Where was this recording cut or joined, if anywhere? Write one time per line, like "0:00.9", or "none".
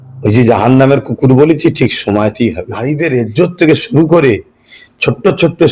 0:02.7